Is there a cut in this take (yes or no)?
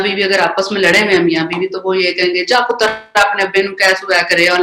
no